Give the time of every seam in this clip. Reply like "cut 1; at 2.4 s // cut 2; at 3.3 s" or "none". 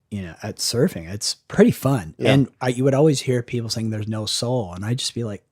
cut 1; at 1.4 s